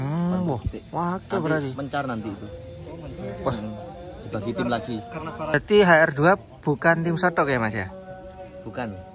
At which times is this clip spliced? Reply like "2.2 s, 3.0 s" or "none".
5.5 s